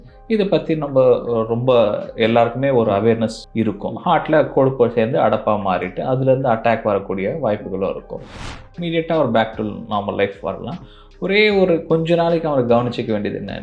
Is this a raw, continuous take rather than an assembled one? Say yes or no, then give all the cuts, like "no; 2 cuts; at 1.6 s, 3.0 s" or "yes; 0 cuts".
no; 1 cut; at 8.5 s